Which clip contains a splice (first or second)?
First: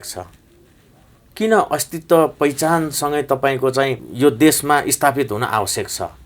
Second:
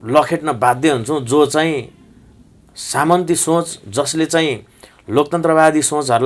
first